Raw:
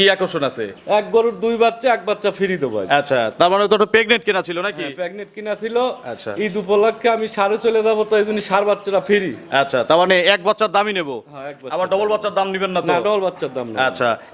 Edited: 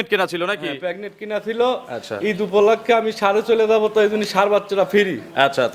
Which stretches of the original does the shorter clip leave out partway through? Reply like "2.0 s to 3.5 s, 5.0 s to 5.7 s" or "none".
none